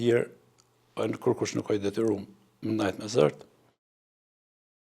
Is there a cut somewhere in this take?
no; 0 cuts

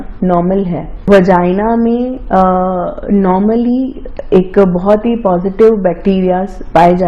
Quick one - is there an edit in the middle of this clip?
yes; 1 cut; at 1.0 s

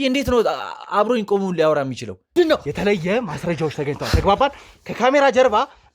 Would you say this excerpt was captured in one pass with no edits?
no; 1 cut; at 2.3 s

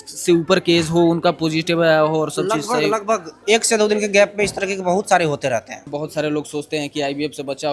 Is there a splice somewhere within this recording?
yes; 1 cut; at 6.0 s

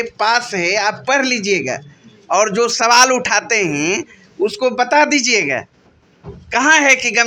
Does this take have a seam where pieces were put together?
no; 0 cuts

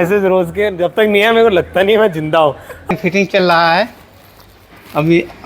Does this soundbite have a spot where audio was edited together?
yes; 1 cut; at 2.8 s

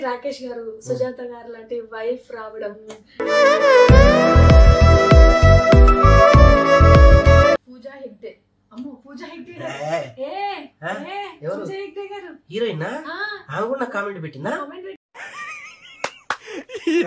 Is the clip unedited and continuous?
no; 1 cut; at 7.7 s

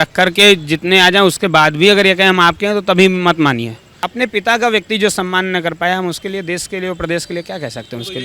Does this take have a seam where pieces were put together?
yes; 1 cut; at 3.9 s

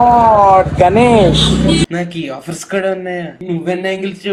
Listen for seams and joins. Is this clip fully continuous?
yes; 0 cuts

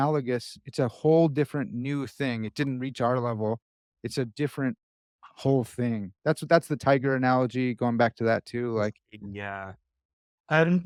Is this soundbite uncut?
yes; 0 cuts

